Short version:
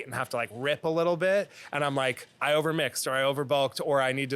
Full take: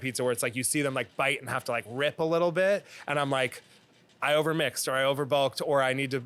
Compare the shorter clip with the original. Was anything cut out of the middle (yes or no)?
yes